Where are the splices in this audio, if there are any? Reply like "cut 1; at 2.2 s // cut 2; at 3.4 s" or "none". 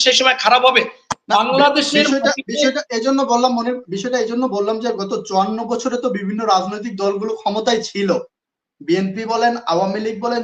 none